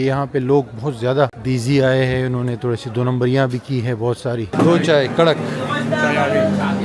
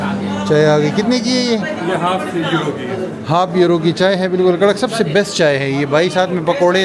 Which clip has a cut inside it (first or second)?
first